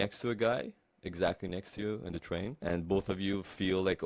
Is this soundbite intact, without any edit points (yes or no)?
no